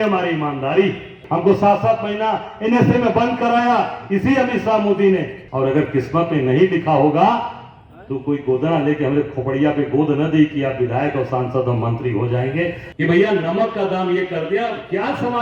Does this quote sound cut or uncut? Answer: cut